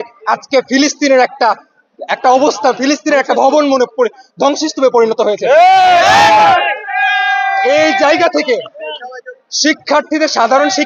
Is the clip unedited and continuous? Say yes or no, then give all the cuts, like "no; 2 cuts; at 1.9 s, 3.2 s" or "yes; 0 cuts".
yes; 0 cuts